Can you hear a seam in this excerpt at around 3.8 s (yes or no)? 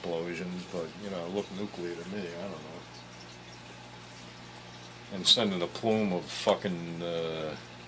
yes